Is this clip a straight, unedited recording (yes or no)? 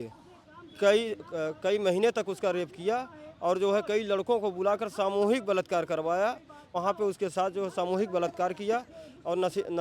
no